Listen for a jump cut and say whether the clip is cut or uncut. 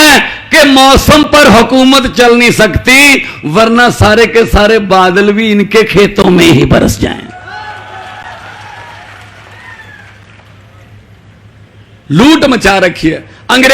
uncut